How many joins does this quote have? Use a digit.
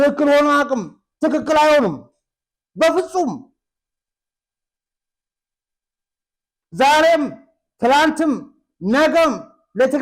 0